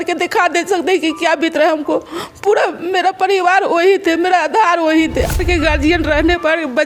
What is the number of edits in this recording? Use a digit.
1